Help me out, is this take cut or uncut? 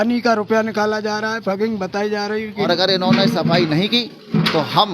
cut